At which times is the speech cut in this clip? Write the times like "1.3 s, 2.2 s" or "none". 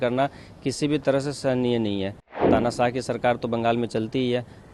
2.5 s

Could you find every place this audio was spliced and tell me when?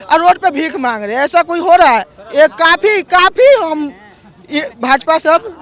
none

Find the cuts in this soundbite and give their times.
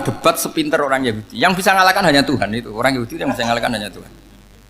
none

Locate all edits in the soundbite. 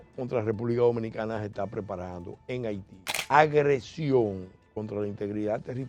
3.1 s

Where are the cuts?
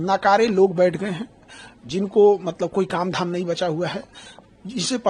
none

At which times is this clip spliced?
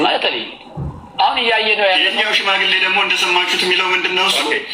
none

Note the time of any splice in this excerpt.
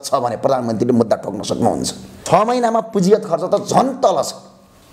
2.1 s

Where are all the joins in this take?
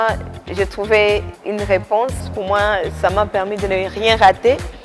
1.4 s, 2.3 s

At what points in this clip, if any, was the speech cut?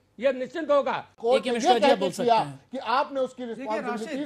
1.1 s

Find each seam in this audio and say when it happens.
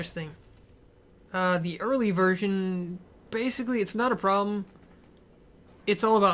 2.9 s

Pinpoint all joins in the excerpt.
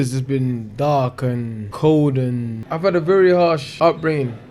1.6 s, 2.7 s, 3.7 s

